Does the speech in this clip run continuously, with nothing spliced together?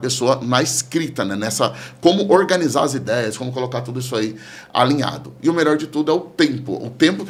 yes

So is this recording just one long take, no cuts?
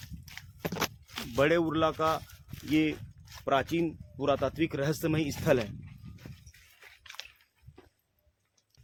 yes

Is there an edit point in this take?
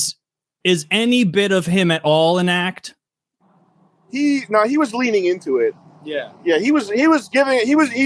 no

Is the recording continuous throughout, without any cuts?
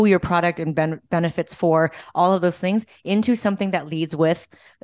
yes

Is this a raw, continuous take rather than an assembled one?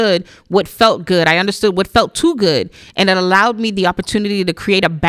yes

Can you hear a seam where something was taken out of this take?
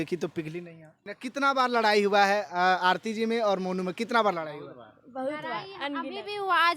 yes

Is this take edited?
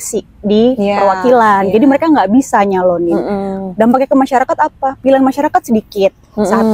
no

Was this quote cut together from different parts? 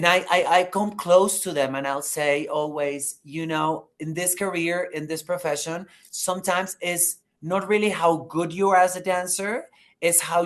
no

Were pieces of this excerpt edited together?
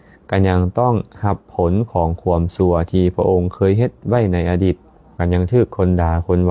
yes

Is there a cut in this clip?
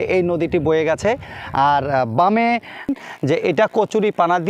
yes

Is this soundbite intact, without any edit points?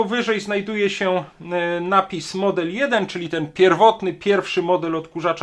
yes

